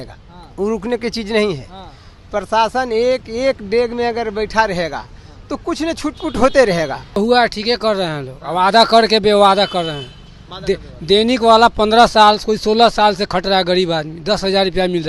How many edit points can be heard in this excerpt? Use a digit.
1